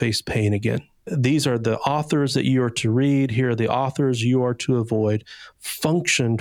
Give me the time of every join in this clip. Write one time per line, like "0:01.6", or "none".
0:01.1